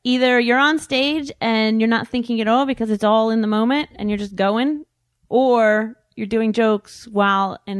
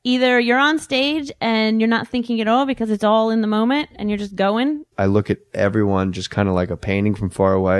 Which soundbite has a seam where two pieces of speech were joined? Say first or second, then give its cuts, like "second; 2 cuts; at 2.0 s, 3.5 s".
first; 1 cut; at 5.0 s